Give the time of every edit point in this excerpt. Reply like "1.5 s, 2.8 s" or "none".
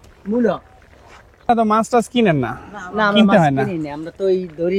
1.5 s

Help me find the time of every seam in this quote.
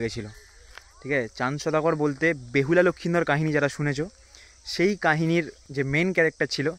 5.6 s

